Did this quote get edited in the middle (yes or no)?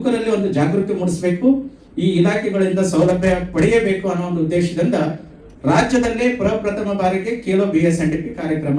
no